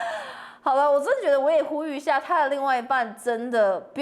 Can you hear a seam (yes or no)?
no